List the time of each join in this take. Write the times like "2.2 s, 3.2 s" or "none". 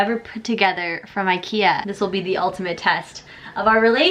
1.9 s